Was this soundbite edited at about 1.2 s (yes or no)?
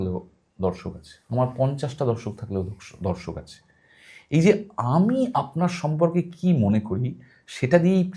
no